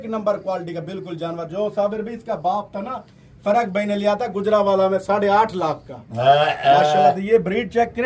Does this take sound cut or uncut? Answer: uncut